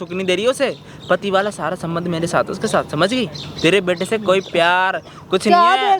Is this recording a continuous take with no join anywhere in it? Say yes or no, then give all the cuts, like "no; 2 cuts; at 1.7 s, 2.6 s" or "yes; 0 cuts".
yes; 0 cuts